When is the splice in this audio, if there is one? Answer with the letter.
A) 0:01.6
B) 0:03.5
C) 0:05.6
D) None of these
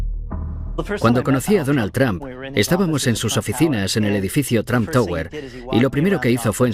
C